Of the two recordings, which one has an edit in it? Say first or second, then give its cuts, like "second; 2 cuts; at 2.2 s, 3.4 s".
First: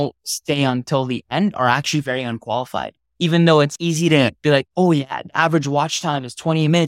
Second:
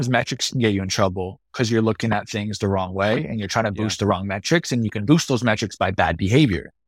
first; 2 cuts; at 3.1 s, 4.7 s